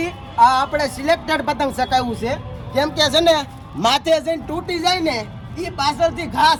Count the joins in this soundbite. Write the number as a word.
zero